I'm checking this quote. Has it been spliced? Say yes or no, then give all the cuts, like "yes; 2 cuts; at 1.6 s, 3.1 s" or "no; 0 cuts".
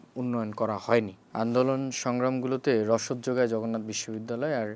yes; 1 cut; at 1.2 s